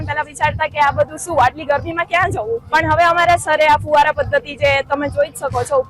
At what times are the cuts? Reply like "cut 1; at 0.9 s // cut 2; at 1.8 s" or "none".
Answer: cut 1; at 2.6 s